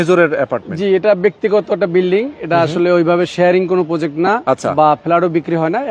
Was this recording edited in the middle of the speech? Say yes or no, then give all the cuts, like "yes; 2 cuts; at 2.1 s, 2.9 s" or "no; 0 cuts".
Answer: no; 0 cuts